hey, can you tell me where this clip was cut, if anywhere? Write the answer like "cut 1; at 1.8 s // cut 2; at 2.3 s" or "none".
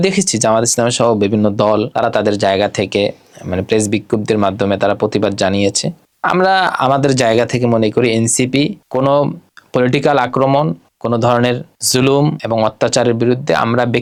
none